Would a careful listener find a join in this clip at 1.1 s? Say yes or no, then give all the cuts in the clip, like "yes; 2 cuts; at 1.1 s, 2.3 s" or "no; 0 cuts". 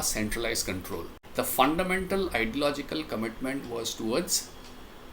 yes; 1 cut; at 1.1 s